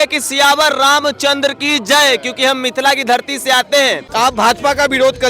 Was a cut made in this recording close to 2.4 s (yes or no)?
no